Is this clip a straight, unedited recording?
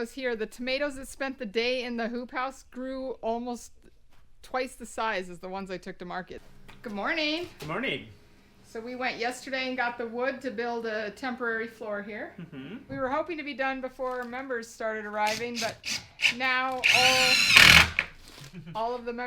no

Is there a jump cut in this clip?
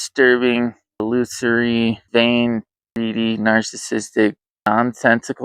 yes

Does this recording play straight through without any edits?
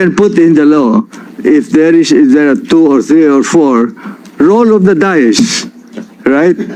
yes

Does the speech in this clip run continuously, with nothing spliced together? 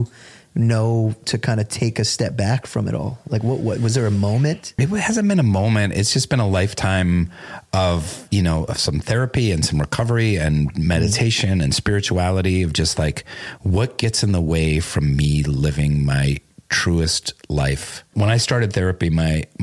no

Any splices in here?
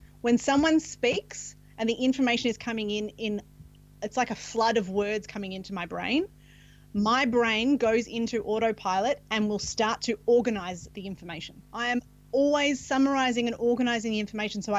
yes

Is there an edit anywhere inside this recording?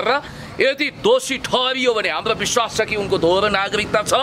no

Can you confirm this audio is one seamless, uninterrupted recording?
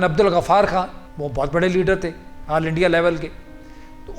no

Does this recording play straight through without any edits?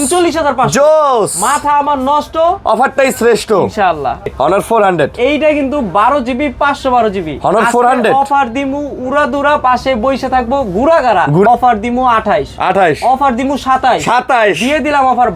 no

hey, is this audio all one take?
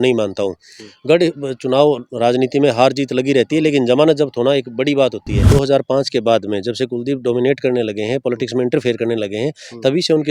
no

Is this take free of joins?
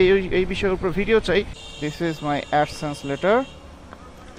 no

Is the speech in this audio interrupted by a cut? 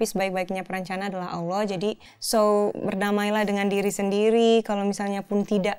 yes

